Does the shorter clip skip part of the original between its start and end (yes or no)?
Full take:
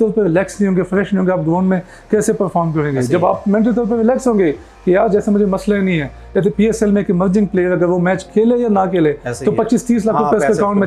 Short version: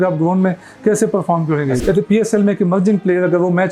yes